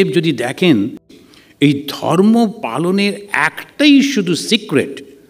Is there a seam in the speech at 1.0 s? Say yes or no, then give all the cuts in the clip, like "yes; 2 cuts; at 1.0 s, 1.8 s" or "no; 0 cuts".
yes; 1 cut; at 1.0 s